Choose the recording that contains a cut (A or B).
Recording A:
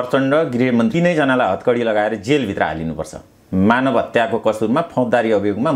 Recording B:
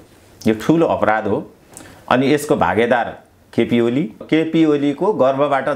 B